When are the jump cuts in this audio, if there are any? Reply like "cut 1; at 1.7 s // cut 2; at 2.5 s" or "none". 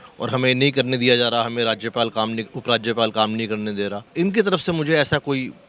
cut 1; at 4.0 s

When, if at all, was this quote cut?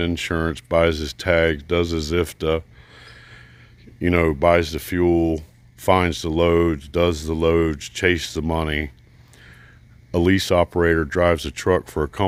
none

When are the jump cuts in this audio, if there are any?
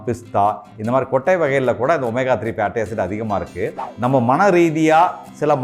cut 1; at 3.8 s

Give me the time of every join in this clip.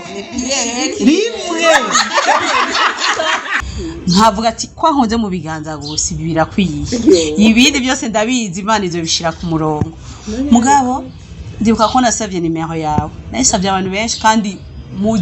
cut 1; at 3.5 s

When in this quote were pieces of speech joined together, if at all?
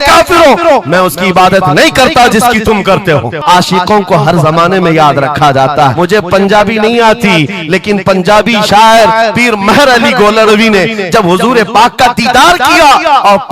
cut 1; at 3.4 s // cut 2; at 5.9 s

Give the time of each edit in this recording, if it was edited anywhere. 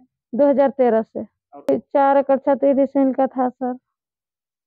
cut 1; at 1.7 s

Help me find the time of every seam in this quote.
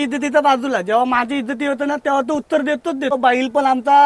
cut 1; at 3.1 s

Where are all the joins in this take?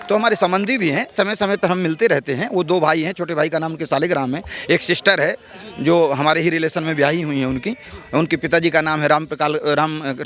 cut 1; at 1.1 s

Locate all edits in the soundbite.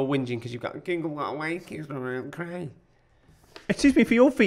none

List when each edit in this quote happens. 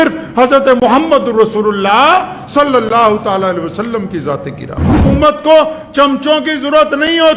cut 1; at 5.0 s

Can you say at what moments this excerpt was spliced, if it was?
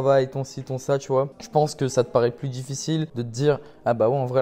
cut 1; at 1.4 s // cut 2; at 3.2 s

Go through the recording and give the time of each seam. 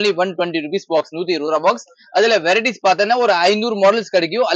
none

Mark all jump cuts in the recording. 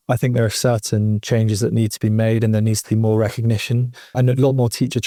none

